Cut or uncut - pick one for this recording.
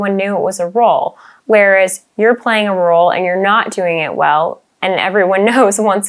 uncut